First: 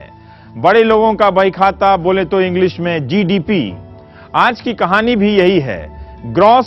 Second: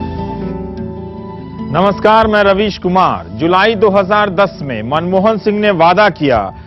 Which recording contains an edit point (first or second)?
second